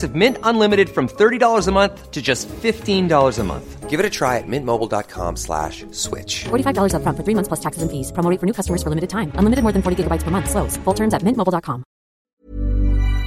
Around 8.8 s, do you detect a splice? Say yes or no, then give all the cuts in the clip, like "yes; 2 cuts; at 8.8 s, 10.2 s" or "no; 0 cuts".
no; 1 cut; at 12.2 s